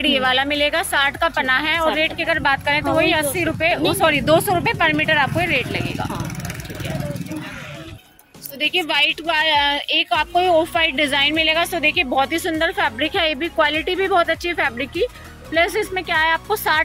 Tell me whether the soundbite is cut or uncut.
uncut